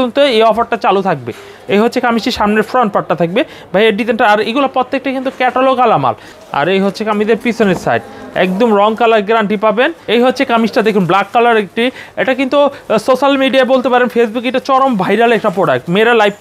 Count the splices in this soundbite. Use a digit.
2